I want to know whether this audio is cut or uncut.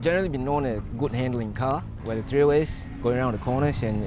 uncut